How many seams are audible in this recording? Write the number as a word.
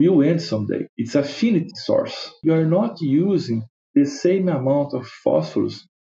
two